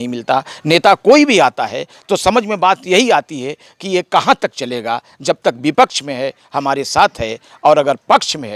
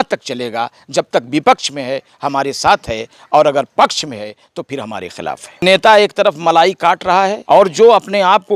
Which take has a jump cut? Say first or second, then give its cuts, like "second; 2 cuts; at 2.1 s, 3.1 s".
second; 2 cuts; at 5.6 s, 7.4 s